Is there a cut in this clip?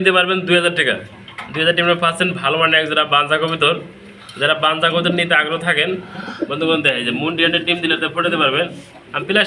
no; 0 cuts

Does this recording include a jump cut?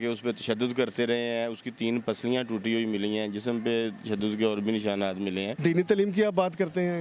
yes; 1 cut; at 5.5 s

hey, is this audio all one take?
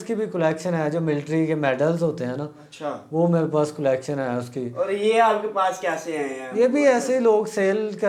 yes; 0 cuts

